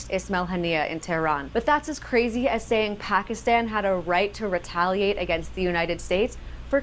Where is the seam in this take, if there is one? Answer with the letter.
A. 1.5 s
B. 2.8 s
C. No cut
A